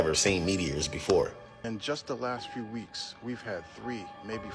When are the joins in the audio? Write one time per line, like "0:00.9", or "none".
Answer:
0:01.7